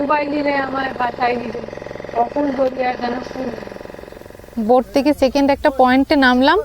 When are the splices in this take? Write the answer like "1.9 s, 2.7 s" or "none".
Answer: 3.9 s